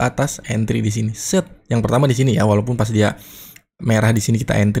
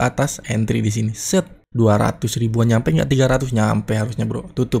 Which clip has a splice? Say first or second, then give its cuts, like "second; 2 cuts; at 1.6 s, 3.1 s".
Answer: second; 1 cut; at 1.6 s